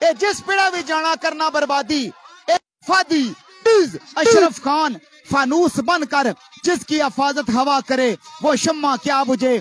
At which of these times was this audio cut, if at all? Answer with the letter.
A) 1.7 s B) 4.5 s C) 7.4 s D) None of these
B